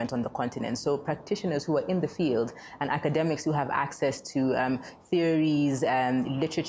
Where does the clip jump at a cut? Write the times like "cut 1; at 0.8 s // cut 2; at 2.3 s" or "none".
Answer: none